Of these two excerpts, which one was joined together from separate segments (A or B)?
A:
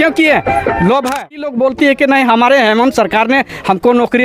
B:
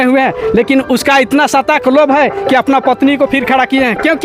A